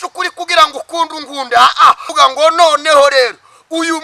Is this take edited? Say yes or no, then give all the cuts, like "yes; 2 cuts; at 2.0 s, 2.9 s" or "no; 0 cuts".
yes; 1 cut; at 2.1 s